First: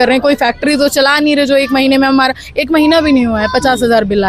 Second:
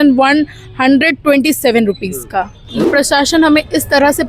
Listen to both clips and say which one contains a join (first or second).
second